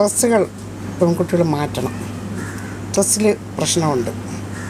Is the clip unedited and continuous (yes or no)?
yes